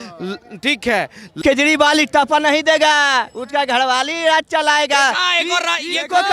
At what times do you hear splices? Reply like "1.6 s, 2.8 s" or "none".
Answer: 1.4 s